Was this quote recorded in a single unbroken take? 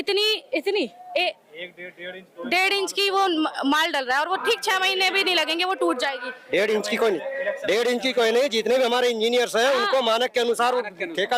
yes; 0 cuts

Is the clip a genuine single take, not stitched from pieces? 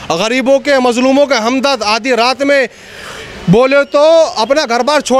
yes; 0 cuts

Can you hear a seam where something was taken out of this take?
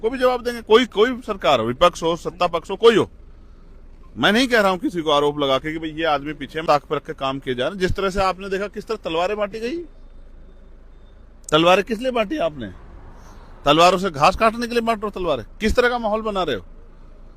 yes; 1 cut; at 6.6 s

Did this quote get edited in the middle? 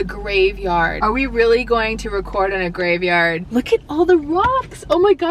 yes; 2 cuts; at 0.9 s, 3.4 s

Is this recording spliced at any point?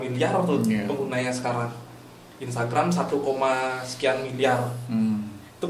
no; 0 cuts

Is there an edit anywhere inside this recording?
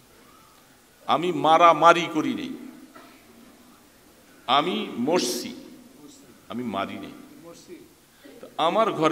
no; 0 cuts

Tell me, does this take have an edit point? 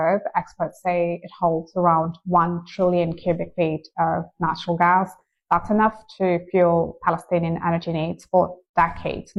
no; 0 cuts

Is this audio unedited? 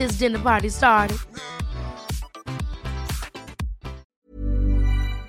no; 1 cut; at 4.1 s

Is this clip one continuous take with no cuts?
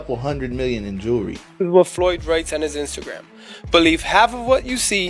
no; 1 cut; at 1.6 s

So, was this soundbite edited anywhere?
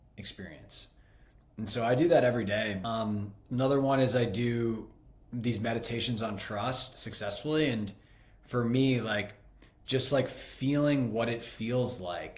yes; 2 cuts; at 2.8 s, 7.0 s

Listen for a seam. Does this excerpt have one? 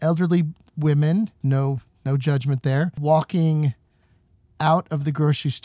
yes; 2 cuts; at 1.4 s, 3.0 s

